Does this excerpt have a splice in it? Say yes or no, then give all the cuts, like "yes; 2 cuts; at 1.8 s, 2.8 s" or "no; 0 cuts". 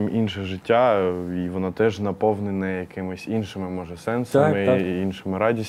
no; 0 cuts